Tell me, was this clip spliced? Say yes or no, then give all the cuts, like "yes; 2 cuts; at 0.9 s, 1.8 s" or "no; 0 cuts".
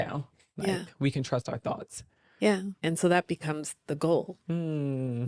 yes; 2 cuts; at 2.7 s, 4.4 s